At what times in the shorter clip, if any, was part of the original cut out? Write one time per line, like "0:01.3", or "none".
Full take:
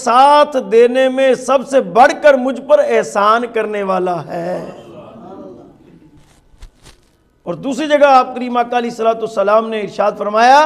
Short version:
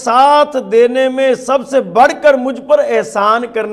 none

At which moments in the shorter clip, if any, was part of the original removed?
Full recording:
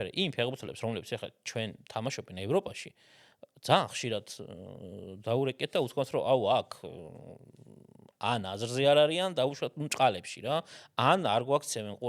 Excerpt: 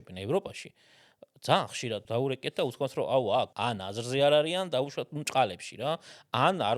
0:02.0
0:03.5

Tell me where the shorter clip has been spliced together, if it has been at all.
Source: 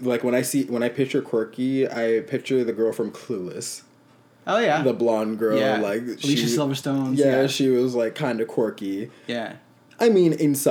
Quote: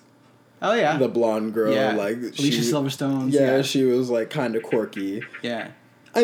none

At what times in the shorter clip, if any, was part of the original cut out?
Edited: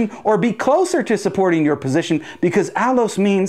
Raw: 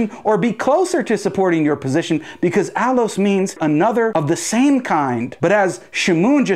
none

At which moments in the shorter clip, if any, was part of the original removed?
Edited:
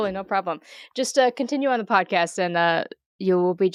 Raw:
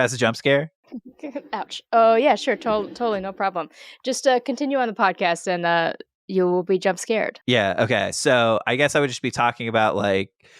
none

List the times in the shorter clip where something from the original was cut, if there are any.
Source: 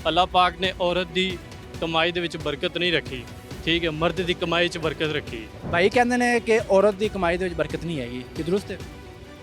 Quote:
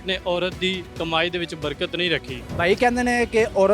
0:00.9
0:02.4

